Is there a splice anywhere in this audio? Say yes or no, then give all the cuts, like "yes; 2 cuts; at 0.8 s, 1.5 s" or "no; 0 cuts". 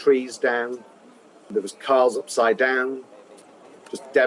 no; 0 cuts